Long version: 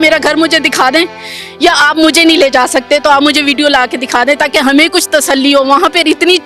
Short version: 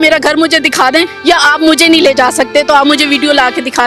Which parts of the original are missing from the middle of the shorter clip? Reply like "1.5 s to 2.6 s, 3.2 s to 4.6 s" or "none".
1.1 s to 1.5 s